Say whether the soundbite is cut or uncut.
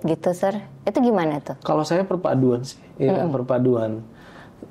uncut